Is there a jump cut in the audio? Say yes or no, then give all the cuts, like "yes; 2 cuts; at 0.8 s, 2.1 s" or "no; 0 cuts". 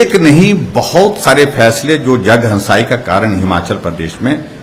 no; 0 cuts